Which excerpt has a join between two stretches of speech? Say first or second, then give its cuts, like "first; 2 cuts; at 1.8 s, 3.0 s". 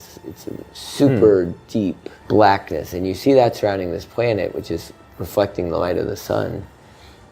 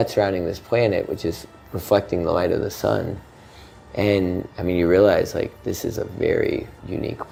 first; 1 cut; at 2.1 s